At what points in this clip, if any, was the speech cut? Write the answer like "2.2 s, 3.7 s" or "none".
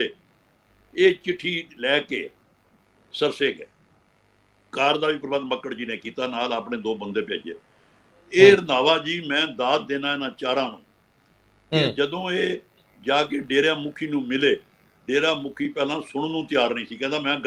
none